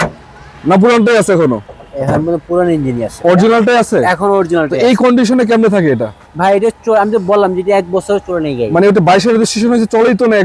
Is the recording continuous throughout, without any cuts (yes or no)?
yes